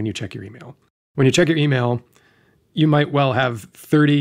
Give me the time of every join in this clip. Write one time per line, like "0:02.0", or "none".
0:01.0